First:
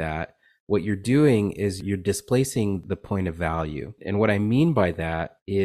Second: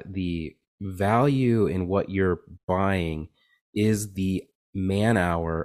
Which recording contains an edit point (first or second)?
first